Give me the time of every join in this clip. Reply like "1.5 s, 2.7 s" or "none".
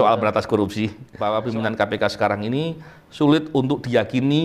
1.1 s